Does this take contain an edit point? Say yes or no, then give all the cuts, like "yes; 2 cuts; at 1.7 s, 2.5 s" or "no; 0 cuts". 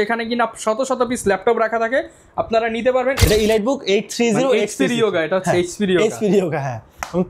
yes; 1 cut; at 3.2 s